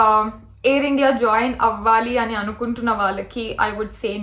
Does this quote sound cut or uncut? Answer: uncut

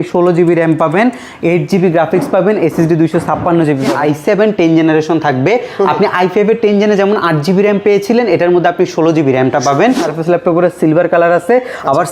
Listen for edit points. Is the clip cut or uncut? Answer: cut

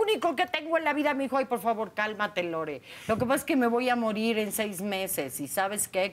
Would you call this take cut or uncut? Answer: uncut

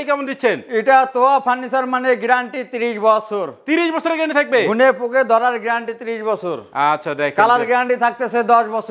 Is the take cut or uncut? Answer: uncut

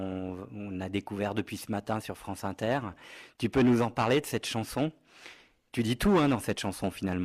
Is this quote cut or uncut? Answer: uncut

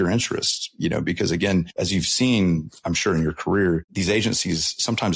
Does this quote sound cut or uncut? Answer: cut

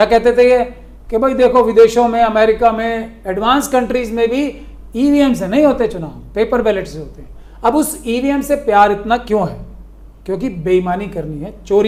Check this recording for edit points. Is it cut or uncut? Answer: uncut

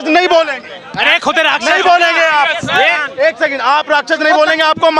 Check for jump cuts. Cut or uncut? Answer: uncut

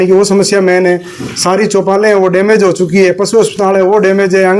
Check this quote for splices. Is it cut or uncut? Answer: uncut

